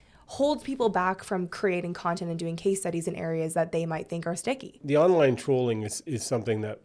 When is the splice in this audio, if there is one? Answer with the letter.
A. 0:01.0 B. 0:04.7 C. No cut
C